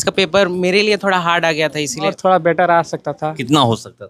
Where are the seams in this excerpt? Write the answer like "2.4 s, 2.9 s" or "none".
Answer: 2.1 s